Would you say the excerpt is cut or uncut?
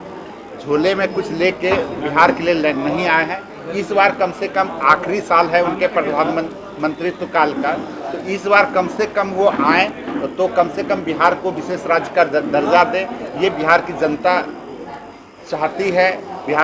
uncut